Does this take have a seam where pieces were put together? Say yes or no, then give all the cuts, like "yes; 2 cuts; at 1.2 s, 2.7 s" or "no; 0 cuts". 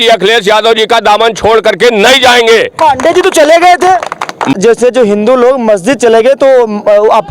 yes; 1 cut; at 4.5 s